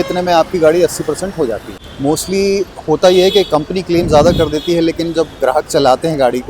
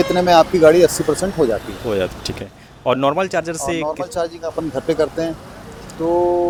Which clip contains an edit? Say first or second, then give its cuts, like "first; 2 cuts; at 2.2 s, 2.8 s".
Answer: first; 1 cut; at 1.8 s